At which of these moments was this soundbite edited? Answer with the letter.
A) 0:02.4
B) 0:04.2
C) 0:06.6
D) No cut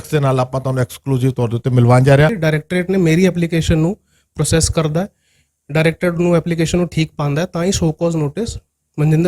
A